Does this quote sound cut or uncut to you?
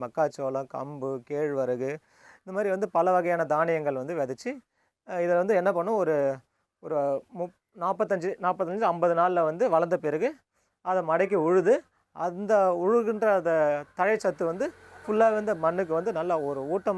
uncut